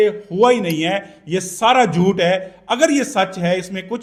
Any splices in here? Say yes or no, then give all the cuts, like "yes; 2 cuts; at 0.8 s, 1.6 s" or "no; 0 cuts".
no; 0 cuts